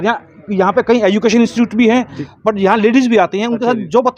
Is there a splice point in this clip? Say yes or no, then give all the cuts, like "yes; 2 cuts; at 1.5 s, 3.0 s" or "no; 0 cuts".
yes; 1 cut; at 2.2 s